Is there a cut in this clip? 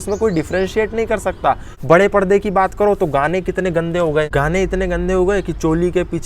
yes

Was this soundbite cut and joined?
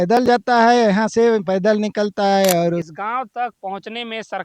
yes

